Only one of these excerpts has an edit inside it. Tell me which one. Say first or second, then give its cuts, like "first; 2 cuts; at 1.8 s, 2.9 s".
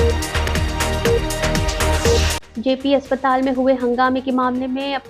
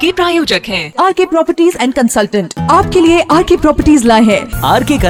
first; 1 cut; at 2.4 s